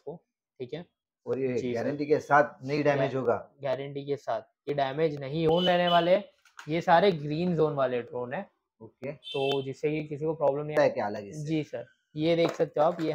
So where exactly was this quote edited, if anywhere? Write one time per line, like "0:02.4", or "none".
0:05.5
0:10.7